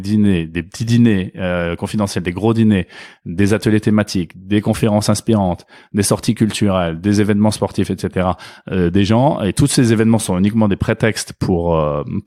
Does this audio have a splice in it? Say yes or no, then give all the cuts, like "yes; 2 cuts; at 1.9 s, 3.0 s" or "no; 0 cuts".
no; 0 cuts